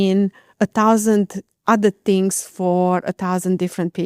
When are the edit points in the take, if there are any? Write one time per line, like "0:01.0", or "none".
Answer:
none